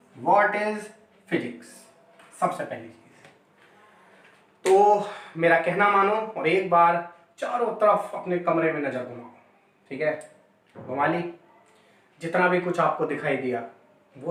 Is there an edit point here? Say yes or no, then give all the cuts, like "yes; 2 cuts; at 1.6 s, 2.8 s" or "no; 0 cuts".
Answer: no; 0 cuts